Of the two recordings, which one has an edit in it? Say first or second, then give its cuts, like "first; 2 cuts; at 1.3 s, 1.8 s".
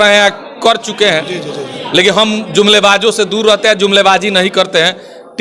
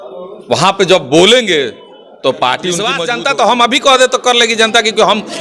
second; 1 cut; at 3.0 s